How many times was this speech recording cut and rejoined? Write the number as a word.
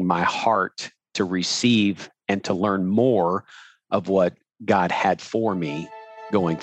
zero